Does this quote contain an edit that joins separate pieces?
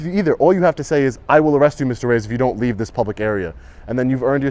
no; 0 cuts

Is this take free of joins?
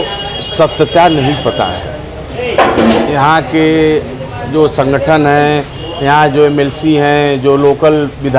yes; 0 cuts

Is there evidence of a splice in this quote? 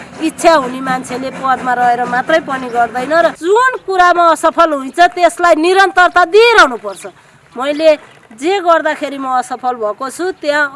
yes; 1 cut; at 3.4 s

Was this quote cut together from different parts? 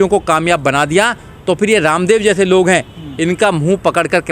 no; 0 cuts

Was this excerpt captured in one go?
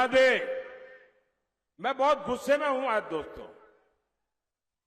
yes; 0 cuts

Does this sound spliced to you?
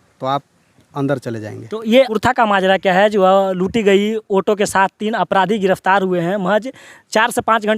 yes; 1 cut; at 2.1 s

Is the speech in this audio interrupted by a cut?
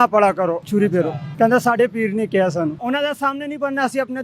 yes; 2 cuts; at 0.7 s, 2.8 s

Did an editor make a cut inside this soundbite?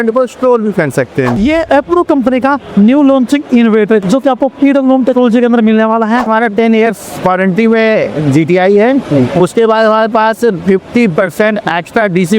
yes; 2 cuts; at 1.4 s, 6.3 s

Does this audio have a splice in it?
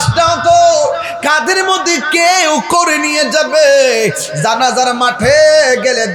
no; 0 cuts

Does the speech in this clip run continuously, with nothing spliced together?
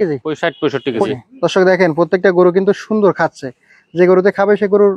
no; 1 cut; at 1.1 s

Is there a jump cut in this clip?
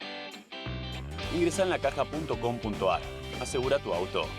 no; 0 cuts

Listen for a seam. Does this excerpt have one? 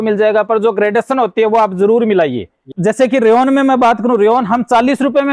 yes; 1 cut; at 2.7 s

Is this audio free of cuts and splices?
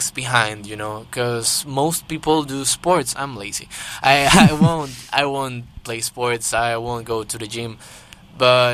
yes; 0 cuts

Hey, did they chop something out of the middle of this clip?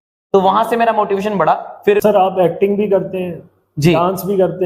yes; 1 cut; at 2.0 s

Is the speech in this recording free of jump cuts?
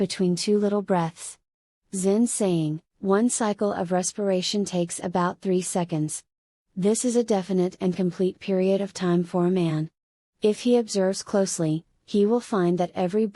no; 1 cut; at 2.9 s

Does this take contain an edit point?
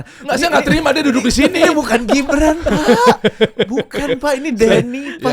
no; 0 cuts

